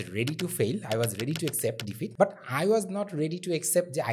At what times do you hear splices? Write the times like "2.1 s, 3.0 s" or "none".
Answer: 2.1 s